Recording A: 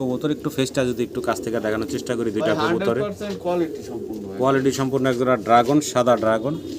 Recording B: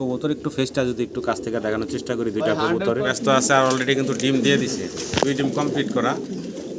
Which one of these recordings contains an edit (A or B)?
B